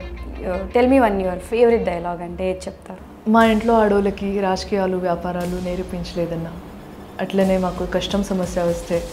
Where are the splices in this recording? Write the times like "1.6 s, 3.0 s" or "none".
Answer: 2.9 s

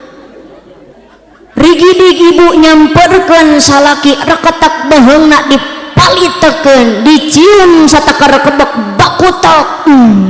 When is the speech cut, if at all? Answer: 0.9 s

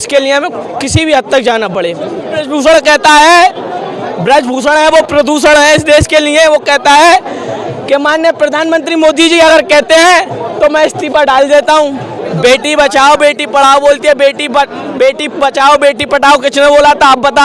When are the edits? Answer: 2.4 s, 12.2 s

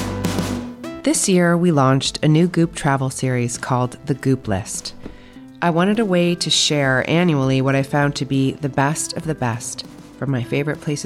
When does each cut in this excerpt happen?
1.0 s

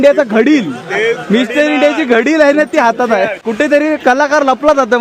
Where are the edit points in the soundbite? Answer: 3.4 s

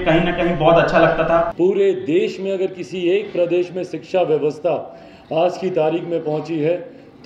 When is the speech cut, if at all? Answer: 1.5 s

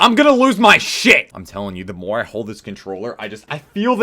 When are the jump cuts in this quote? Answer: 1.3 s

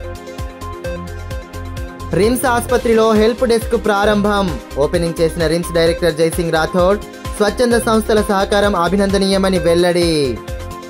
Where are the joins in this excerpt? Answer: 0.9 s

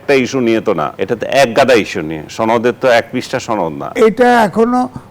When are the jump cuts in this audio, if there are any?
0.9 s, 3.9 s

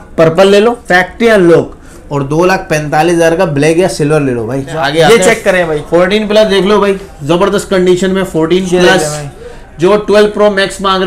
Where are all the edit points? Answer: 0.8 s, 4.7 s

